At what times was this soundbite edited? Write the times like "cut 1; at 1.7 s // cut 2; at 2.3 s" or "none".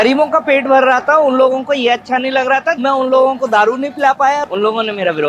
cut 1; at 2.8 s // cut 2; at 4.4 s